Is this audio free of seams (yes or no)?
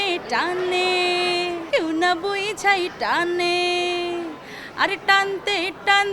no